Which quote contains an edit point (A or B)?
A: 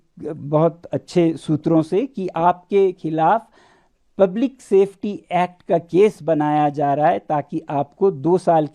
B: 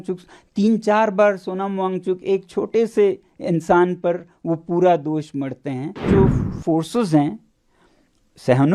B